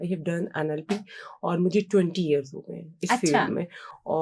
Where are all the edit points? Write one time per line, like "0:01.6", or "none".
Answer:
none

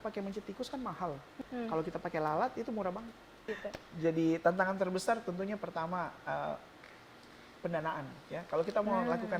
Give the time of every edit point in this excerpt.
0:01.3
0:03.5

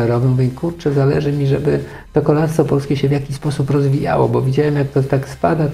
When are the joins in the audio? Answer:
none

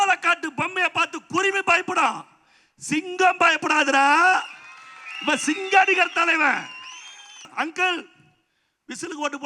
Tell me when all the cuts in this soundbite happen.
0:07.5

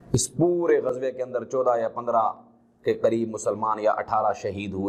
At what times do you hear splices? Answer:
none

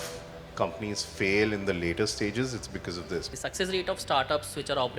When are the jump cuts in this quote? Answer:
0:03.3

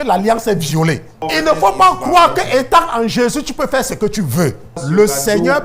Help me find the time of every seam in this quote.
0:01.1
0:04.8

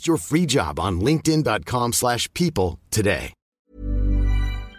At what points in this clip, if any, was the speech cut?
0:03.4

